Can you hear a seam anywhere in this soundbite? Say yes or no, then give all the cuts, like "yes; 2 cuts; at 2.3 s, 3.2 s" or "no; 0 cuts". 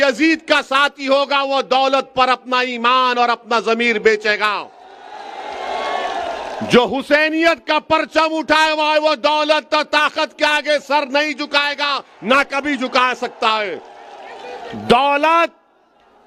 no; 0 cuts